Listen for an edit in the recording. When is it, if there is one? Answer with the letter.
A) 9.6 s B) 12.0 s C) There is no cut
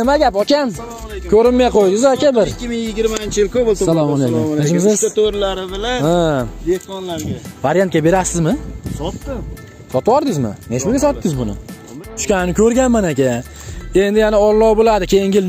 B